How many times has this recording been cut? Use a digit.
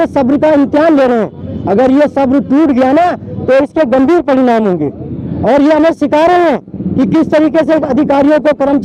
0